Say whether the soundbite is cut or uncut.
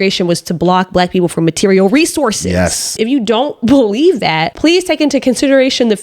cut